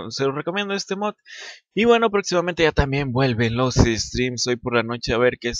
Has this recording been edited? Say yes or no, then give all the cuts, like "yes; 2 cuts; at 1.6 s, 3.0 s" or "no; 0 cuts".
yes; 1 cut; at 4.6 s